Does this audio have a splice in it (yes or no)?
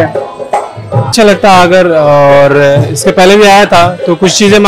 yes